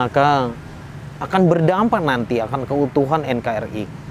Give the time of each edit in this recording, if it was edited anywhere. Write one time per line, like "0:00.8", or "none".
none

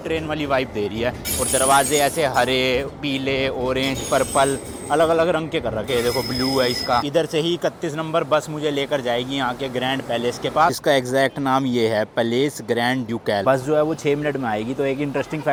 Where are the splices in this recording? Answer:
none

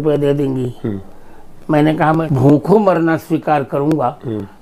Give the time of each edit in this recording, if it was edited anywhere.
0:02.3

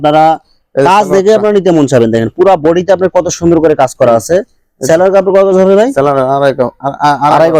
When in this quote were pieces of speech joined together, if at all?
none

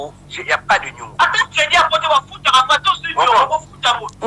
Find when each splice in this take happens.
0:01.0

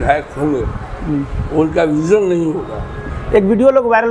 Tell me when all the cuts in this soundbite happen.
0:03.0

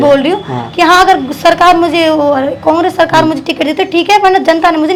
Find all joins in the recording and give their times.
none

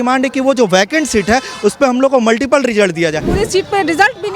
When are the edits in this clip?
0:03.3

